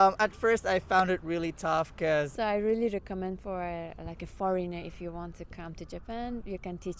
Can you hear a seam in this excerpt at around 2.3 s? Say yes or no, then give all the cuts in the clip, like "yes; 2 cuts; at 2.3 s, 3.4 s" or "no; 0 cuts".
yes; 1 cut; at 2.3 s